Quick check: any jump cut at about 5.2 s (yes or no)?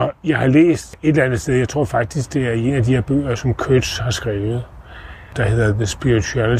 yes